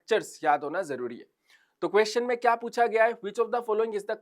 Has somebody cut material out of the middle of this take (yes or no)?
no